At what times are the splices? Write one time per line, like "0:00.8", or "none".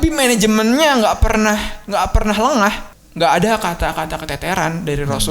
0:02.9